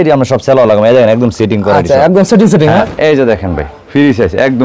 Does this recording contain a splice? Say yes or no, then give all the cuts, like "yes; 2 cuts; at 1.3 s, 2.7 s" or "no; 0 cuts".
yes; 1 cut; at 2.8 s